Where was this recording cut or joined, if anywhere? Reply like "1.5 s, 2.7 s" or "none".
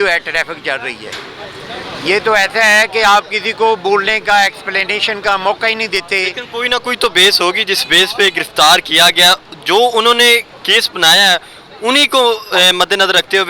none